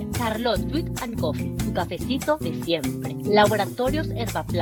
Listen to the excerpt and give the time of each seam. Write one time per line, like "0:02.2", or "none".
none